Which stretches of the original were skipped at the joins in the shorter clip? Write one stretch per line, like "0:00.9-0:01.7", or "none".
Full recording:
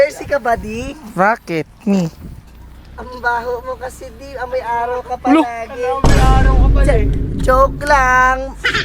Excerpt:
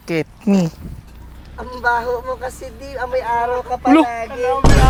none